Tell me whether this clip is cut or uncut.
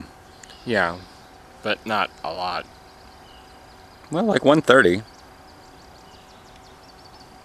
uncut